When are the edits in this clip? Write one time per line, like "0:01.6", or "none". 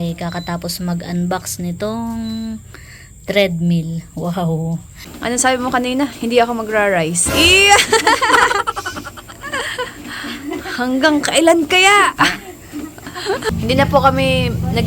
0:05.1
0:13.5